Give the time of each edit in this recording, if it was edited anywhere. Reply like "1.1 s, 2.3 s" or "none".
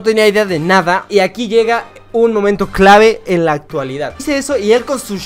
1.1 s, 4.2 s